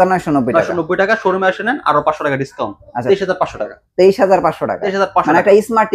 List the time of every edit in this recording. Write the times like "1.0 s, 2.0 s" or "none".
none